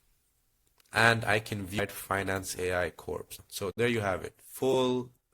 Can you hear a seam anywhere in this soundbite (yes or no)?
yes